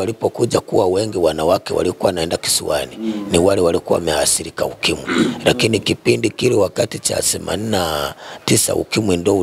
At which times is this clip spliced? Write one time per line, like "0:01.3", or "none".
none